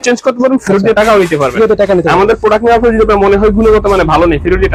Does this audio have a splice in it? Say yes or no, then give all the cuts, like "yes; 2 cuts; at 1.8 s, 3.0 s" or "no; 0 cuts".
no; 0 cuts